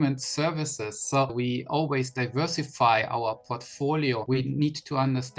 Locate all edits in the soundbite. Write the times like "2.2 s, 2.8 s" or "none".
1.3 s, 4.2 s